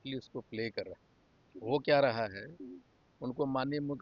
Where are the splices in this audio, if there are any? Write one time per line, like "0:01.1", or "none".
none